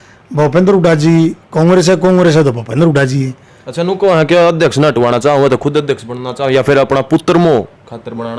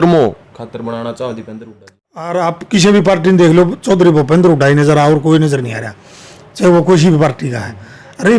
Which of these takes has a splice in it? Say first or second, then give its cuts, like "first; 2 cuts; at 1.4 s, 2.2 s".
second; 1 cut; at 2.3 s